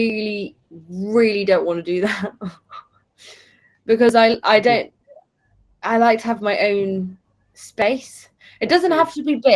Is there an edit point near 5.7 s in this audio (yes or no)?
no